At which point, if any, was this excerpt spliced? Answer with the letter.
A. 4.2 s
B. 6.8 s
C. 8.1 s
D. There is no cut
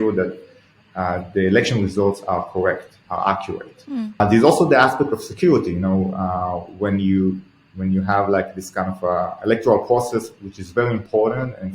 A